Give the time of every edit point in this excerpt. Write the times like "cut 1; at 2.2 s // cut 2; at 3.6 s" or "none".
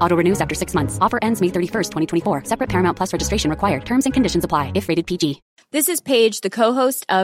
cut 1; at 5.5 s